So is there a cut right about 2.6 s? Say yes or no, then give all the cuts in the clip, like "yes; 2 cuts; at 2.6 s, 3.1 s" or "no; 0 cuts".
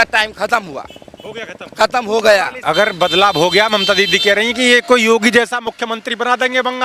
yes; 1 cut; at 2.6 s